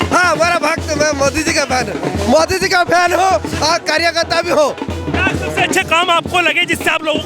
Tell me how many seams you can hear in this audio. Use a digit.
0